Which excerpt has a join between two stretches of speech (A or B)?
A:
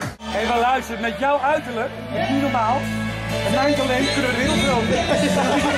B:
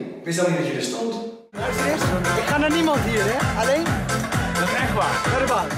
B